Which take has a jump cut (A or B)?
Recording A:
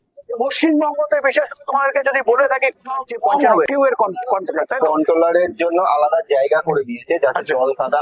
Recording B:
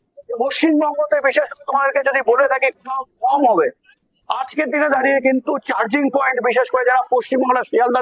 A